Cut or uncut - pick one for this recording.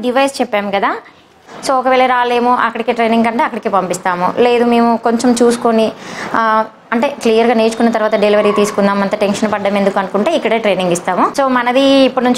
cut